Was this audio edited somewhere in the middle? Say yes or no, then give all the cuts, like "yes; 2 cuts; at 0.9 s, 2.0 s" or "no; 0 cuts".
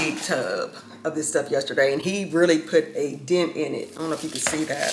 no; 0 cuts